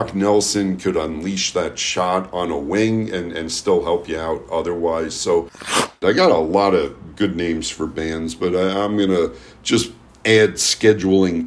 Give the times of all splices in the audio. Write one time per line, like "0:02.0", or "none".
0:05.6

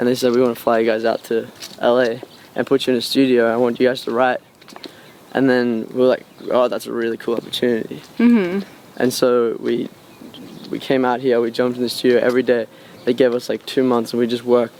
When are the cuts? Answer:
none

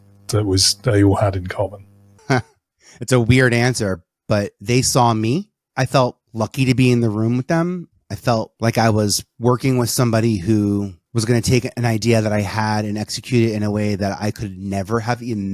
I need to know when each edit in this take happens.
0:05.6
0:06.2
0:08.5
0:09.3
0:11.0

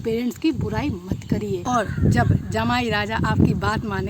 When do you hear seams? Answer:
0:01.6

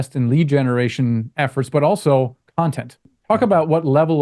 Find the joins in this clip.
0:03.1

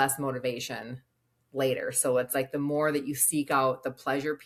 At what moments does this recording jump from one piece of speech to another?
none

